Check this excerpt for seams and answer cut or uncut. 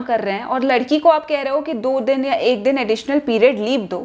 uncut